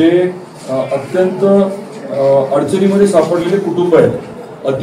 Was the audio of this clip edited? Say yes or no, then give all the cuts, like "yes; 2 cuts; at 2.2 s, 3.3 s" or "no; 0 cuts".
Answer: no; 0 cuts